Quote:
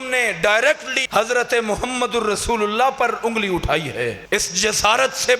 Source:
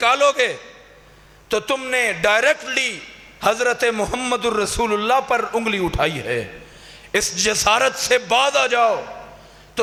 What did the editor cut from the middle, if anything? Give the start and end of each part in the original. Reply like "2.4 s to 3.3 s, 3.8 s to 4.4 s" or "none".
2.7 s to 3.2 s, 6.5 s to 7.0 s